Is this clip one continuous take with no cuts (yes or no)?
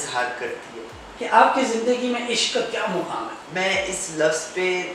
no